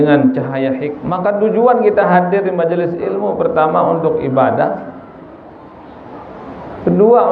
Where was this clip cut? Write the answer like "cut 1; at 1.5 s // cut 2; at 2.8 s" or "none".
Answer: cut 1; at 0.9 s